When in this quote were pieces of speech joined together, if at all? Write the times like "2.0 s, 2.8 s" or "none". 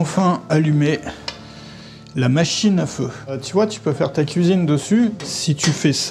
3.4 s, 5.2 s